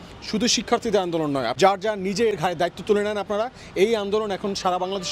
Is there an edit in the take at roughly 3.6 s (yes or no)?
no